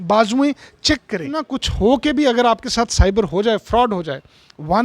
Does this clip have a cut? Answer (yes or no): yes